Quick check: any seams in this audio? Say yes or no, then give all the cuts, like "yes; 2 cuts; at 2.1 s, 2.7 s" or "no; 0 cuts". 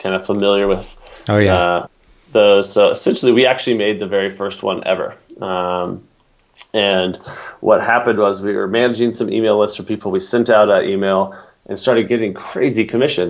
no; 0 cuts